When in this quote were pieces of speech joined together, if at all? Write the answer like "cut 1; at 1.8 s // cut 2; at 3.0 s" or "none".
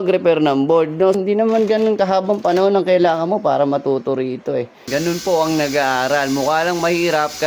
cut 1; at 1.2 s // cut 2; at 4.8 s